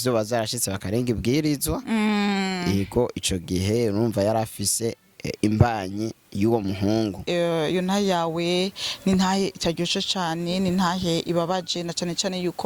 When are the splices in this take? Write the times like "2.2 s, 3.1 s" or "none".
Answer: 7.2 s